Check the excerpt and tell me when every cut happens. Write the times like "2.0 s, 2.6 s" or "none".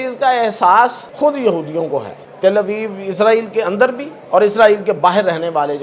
1.0 s, 2.2 s, 4.1 s